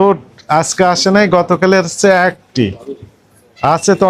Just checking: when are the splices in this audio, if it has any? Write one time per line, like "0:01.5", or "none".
none